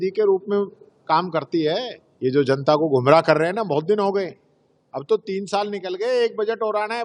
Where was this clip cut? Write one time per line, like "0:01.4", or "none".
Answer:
0:02.0